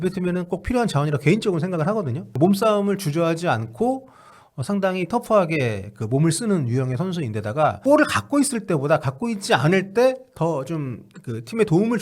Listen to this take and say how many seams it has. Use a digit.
2